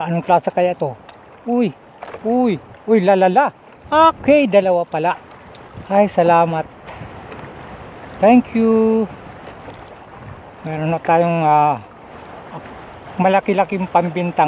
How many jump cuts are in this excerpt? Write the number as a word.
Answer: zero